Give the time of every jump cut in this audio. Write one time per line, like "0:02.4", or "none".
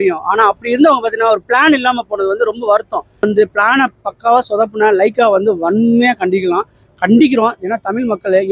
0:03.2

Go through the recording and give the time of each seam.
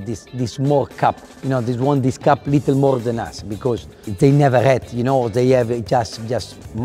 none

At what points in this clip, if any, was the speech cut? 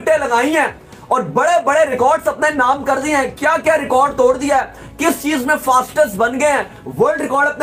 none

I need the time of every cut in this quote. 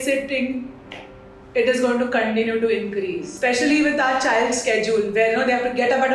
0:03.2

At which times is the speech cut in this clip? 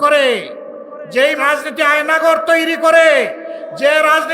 0:01.4

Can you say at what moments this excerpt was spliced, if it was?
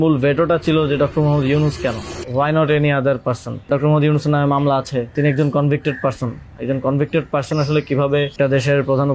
0:02.1
0:03.7
0:05.1
0:08.3

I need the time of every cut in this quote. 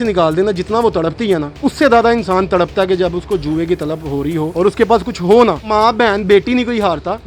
0:01.5
0:04.5

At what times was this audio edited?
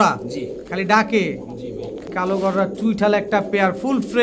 0:02.1

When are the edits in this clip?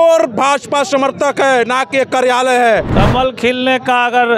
0:02.9

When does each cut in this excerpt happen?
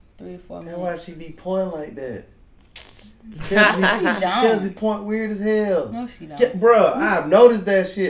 none

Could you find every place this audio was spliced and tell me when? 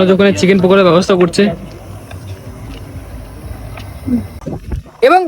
0:04.3

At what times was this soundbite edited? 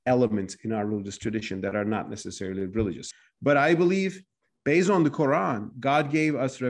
0:03.0

